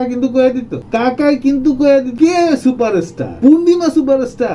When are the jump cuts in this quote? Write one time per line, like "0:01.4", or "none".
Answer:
0:02.1

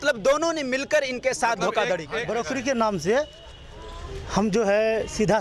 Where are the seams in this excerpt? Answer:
0:02.2

